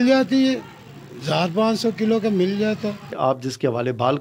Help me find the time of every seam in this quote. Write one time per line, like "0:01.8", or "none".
0:03.1